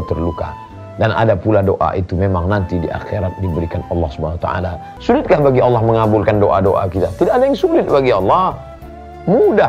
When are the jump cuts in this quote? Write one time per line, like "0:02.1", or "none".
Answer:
0:04.9